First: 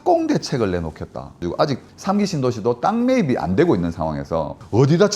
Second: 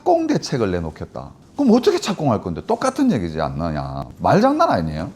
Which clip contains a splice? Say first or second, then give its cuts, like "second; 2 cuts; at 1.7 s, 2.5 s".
first; 1 cut; at 1.4 s